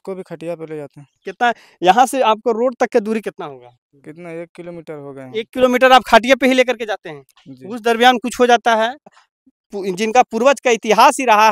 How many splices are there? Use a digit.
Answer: 1